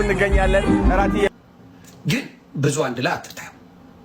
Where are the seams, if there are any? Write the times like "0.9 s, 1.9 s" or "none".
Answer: 1.3 s

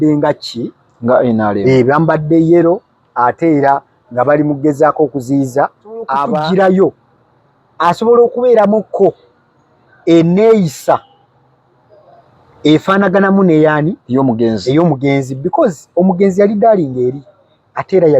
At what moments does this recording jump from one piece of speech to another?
6.3 s

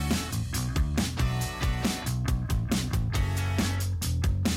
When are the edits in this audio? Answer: 2.4 s

